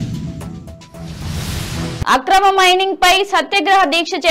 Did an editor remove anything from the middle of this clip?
yes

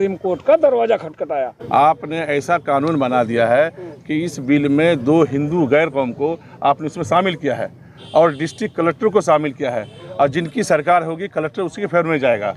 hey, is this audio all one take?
no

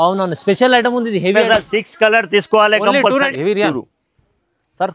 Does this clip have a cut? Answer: yes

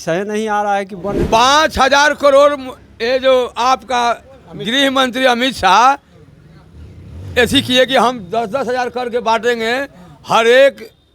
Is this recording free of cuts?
no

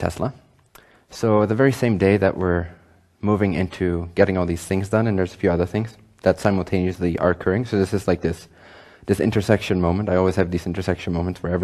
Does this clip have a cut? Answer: no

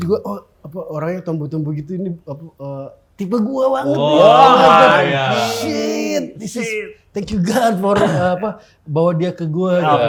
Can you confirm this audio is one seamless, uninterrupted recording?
yes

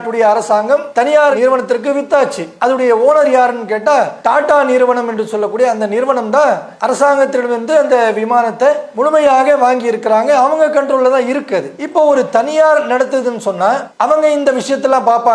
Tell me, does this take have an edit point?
yes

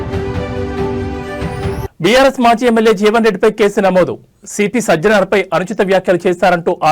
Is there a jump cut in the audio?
yes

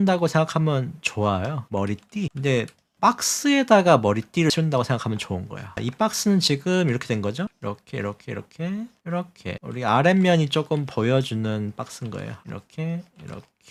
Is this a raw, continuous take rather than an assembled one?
yes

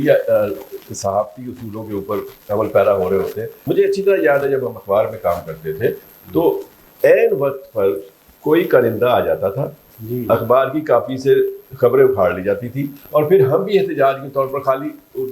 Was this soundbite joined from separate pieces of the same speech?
yes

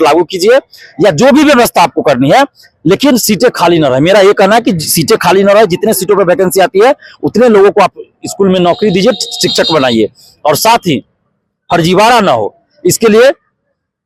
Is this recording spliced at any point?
no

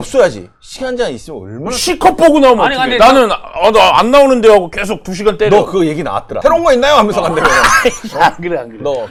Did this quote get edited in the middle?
no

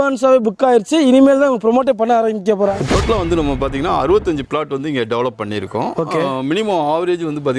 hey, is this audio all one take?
no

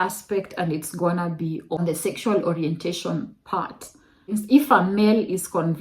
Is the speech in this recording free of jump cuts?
no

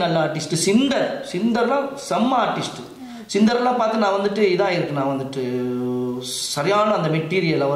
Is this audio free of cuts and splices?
yes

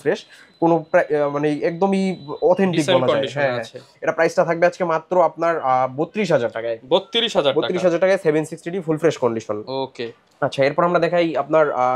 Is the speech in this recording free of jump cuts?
yes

